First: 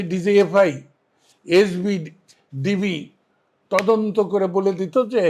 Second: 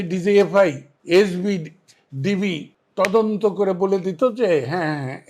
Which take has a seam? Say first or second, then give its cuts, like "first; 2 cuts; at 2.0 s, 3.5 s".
second; 2 cuts; at 0.9 s, 2.8 s